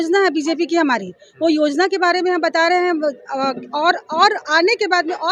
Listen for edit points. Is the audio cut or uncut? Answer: uncut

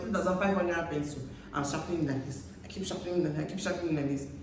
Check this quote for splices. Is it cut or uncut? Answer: uncut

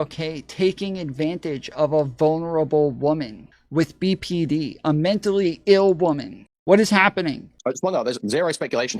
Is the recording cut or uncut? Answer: cut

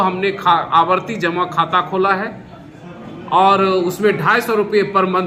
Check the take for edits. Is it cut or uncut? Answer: uncut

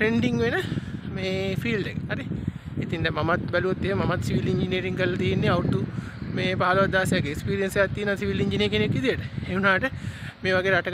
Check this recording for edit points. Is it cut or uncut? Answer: uncut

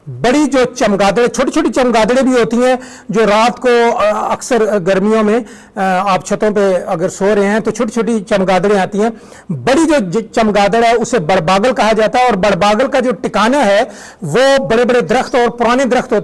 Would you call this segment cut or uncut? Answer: uncut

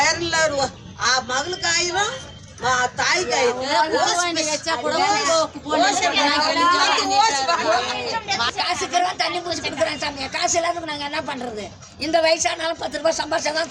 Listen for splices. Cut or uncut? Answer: cut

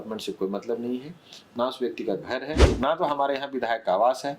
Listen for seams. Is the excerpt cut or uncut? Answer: cut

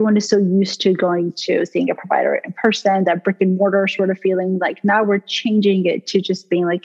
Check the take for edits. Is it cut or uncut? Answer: uncut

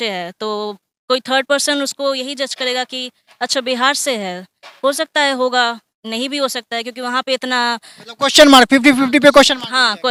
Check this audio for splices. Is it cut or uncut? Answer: uncut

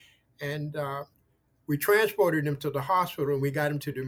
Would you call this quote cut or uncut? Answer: cut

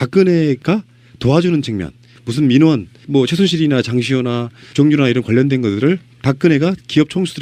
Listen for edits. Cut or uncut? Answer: uncut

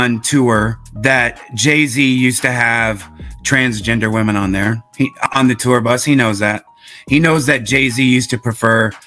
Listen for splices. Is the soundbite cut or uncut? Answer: uncut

